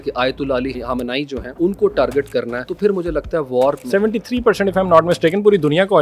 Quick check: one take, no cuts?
no; 3 cuts; at 1.1 s, 2.6 s, 3.8 s

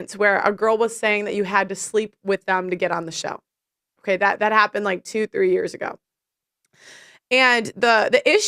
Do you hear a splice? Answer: no; 0 cuts

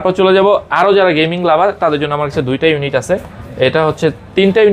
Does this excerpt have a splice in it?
no; 0 cuts

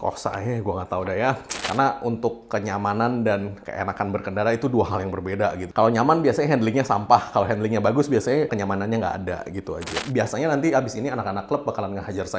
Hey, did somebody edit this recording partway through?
yes; 4 cuts; at 1.5 s, 5.7 s, 8.5 s, 10.0 s

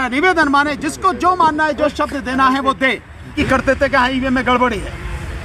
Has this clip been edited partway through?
yes; 1 cut; at 3.4 s

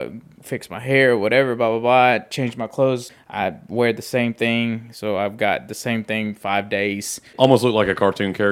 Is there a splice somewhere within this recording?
yes; 2 cuts; at 3.1 s, 7.3 s

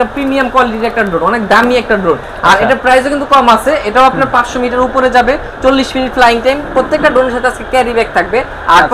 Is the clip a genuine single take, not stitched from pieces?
yes; 0 cuts

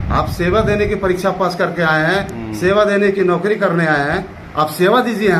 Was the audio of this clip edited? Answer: no; 0 cuts

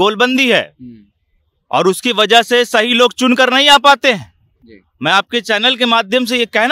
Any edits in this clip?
no; 0 cuts

